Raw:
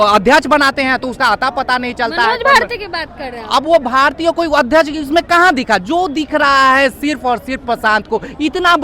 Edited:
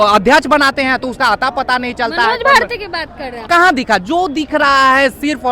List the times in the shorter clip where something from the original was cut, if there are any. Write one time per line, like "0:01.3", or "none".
0:03.5